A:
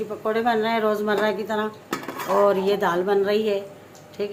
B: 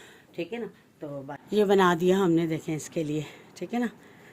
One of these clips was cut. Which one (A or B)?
B